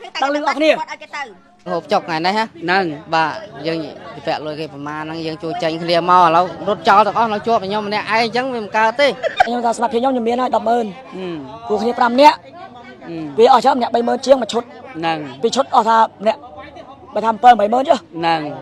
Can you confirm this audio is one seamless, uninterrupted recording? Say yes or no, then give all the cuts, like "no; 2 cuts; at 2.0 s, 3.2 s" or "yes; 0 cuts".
no; 2 cuts; at 1.7 s, 9.5 s